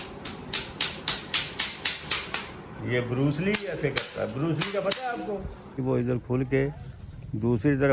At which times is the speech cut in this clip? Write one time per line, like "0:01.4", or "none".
0:05.8